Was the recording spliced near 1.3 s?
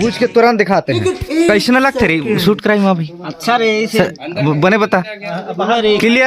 yes; 1 cut; at 1.3 s

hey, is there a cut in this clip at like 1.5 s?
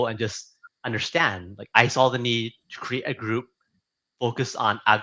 yes; 1 cut; at 1.5 s

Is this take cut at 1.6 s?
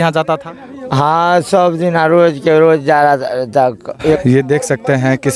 no; 1 cut; at 3.8 s

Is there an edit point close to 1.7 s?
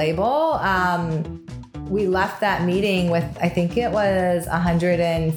yes; 1 cut; at 1.7 s

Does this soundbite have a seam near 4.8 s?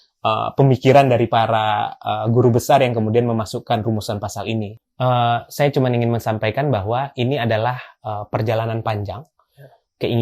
yes; 1 cut; at 4.8 s

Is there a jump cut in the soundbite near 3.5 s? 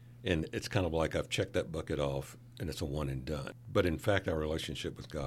yes; 1 cut; at 3.5 s

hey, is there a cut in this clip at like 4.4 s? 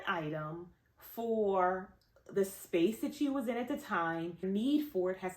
yes; 1 cut; at 4.4 s

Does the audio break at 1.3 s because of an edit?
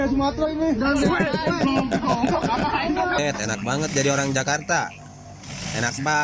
no; 1 cut; at 3.2 s

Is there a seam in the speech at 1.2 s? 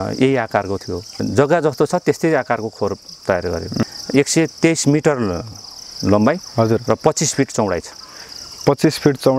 yes; 2 cuts; at 1.2 s, 3.9 s

